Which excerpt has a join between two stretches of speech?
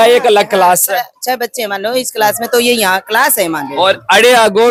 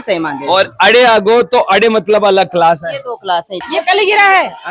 second; 1 cut; at 3.6 s

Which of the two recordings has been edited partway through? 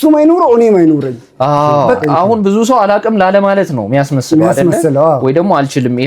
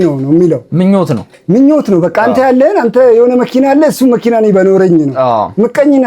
first; 1 cut; at 2.0 s

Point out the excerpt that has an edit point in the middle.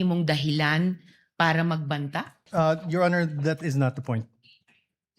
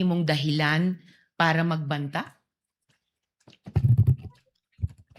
first; 1 cut; at 2.4 s

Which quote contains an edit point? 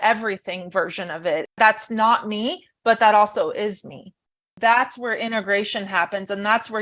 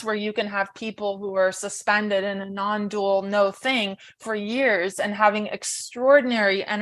first; 2 cuts; at 1.5 s, 4.5 s

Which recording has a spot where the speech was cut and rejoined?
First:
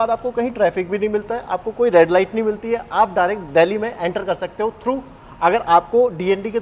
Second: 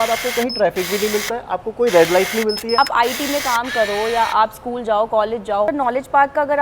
second; 2 cuts; at 2.8 s, 5.7 s

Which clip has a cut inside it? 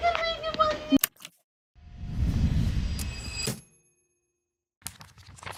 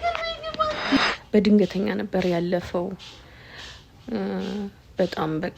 second; 1 cut; at 1.2 s

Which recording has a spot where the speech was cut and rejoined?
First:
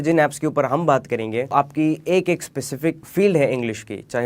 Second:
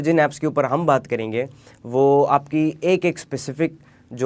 first; 2 cuts; at 1.5 s, 3.0 s

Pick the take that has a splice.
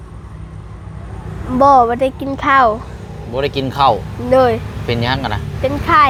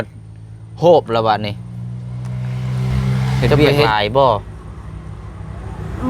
second; 1 cut; at 3.6 s

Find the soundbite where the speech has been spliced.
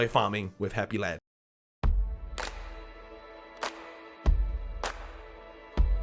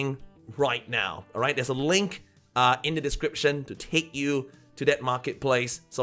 first; 1 cut; at 1.2 s

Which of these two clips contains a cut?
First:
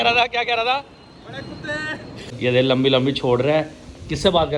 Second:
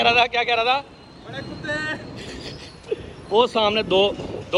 first; 1 cut; at 2.3 s

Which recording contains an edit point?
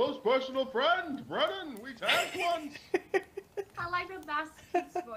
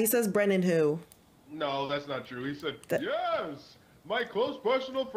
first; 1 cut; at 3.7 s

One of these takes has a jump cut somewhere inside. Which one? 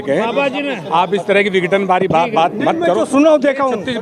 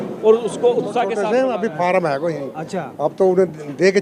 second; 1 cut; at 1.1 s

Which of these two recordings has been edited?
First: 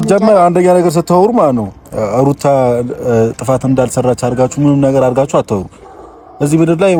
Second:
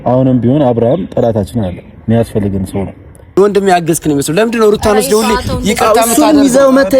second; 1 cut; at 3.3 s

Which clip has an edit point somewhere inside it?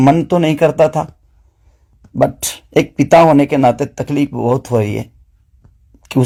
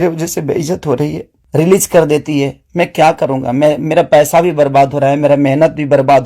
second; 1 cut; at 1.3 s

